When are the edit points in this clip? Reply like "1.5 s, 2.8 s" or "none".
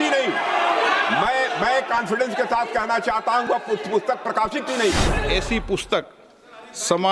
5.3 s